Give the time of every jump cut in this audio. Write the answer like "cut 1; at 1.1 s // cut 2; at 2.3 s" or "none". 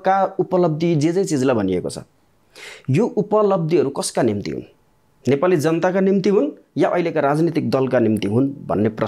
none